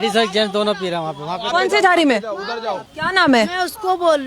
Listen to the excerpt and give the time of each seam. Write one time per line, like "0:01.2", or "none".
0:02.9